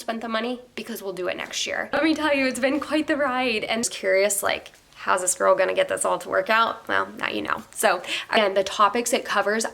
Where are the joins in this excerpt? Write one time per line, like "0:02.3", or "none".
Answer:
0:02.0
0:03.8
0:08.4